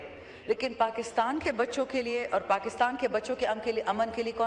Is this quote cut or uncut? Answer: uncut